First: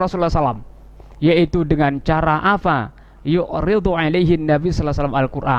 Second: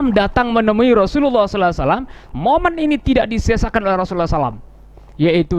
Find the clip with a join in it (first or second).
second